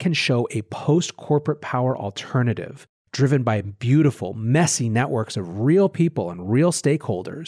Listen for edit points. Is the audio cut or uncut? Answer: uncut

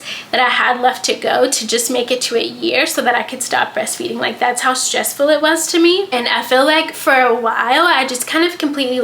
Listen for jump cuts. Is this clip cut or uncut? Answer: cut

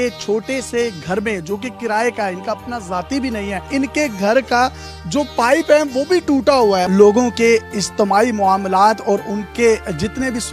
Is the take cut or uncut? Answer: cut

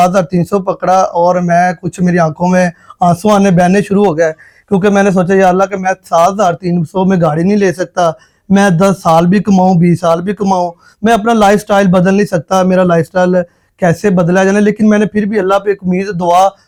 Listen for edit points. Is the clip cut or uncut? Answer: uncut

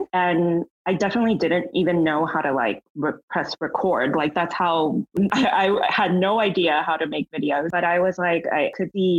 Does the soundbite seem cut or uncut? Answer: cut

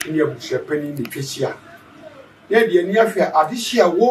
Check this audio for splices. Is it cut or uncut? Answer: uncut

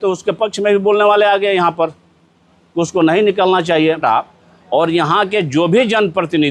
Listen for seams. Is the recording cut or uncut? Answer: cut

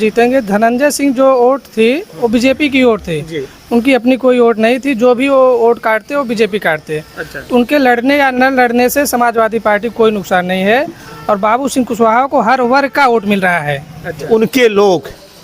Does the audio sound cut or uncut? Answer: cut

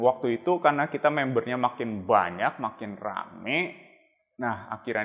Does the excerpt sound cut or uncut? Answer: uncut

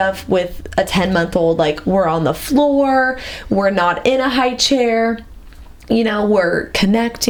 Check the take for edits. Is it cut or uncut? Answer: uncut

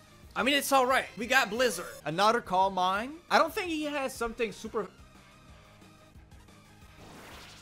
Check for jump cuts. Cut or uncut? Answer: cut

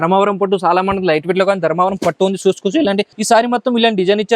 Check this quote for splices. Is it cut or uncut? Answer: cut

